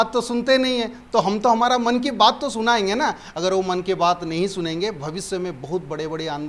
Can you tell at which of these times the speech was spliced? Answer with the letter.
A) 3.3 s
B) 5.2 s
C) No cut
C